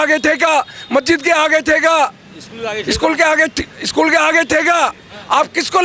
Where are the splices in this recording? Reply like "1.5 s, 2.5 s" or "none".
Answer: none